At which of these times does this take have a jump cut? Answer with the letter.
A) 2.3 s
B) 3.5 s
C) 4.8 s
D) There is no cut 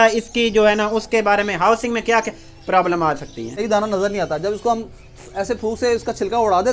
B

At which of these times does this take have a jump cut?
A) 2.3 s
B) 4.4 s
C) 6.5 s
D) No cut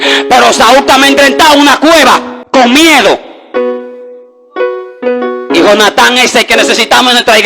A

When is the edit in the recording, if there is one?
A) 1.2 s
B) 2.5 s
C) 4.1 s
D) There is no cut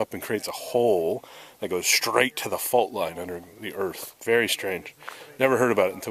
C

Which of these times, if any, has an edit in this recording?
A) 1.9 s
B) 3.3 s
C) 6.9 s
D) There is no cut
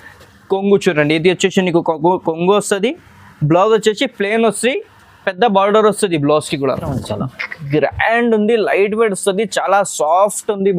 C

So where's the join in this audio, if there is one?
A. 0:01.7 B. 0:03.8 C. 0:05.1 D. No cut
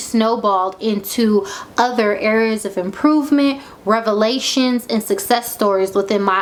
D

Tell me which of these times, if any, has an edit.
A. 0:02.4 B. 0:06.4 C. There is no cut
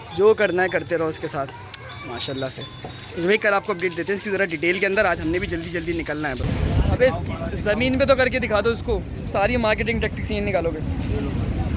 B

